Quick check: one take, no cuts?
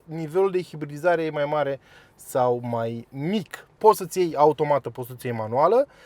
yes; 0 cuts

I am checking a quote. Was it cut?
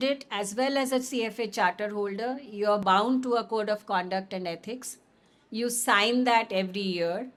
no; 0 cuts

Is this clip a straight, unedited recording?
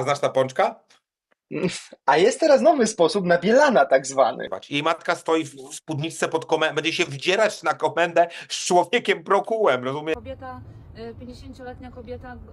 no; 2 cuts; at 4.4 s, 10.2 s

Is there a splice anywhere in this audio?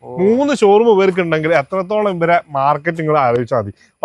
no; 0 cuts

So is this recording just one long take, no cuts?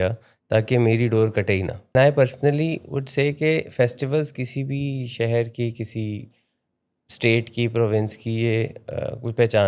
no; 1 cut; at 1.9 s

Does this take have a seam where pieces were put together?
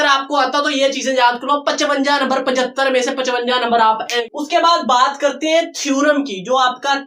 yes; 1 cut; at 4.2 s

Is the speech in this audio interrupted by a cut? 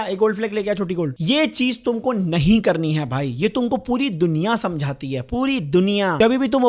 yes; 1 cut; at 1.1 s

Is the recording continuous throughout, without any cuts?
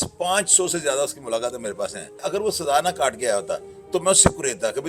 no; 1 cut; at 2.2 s

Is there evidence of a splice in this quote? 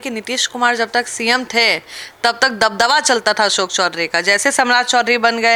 no; 0 cuts

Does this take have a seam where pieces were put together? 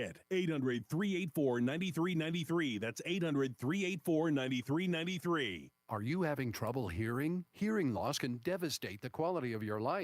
yes; 2 cuts; at 0.9 s, 5.6 s

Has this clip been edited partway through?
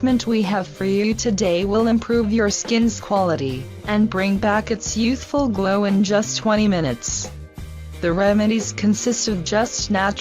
yes; 1 cut; at 1.6 s

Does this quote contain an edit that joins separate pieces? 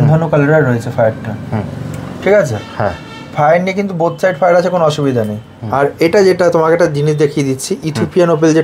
no; 0 cuts

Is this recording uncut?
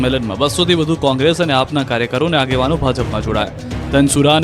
no; 1 cut; at 1.8 s

